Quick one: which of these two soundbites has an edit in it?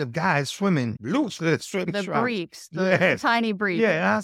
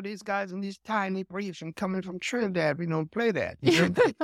first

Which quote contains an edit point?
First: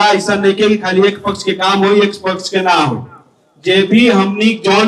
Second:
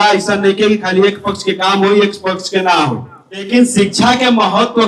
second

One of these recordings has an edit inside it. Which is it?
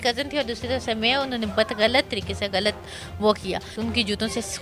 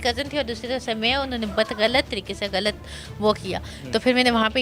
first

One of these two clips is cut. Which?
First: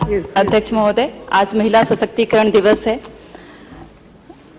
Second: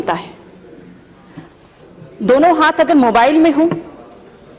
second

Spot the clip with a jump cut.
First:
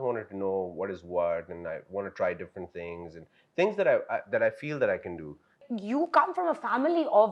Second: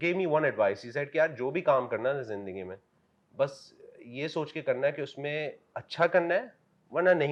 first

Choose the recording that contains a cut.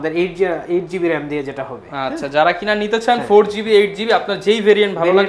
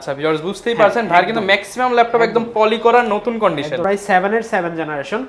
second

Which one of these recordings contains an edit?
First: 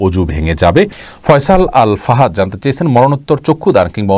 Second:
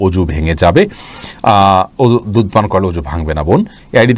first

